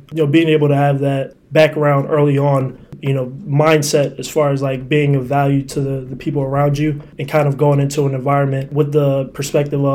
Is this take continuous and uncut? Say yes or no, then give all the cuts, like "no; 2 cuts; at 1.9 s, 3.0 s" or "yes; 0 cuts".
no; 2 cuts; at 2.9 s, 8.7 s